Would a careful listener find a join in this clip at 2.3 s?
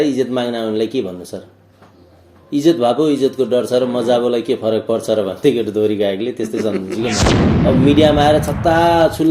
no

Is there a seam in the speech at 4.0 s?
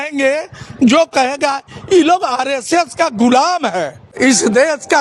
yes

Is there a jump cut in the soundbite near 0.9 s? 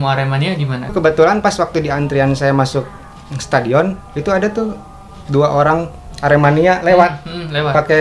yes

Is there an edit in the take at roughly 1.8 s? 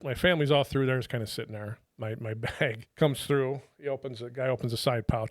yes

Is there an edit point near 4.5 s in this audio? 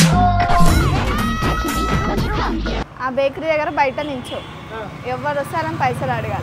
no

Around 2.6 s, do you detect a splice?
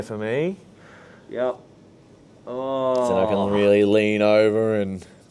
no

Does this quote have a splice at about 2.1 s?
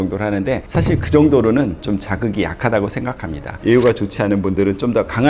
no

